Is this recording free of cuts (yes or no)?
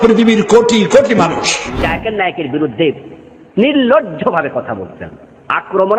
no